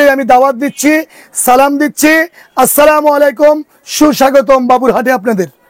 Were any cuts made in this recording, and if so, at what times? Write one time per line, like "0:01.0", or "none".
none